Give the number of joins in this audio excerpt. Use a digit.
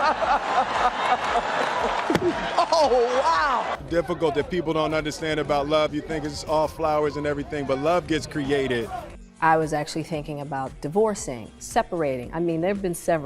2